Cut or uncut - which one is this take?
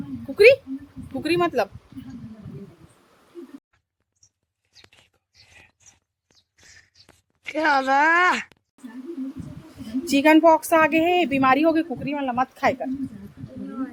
uncut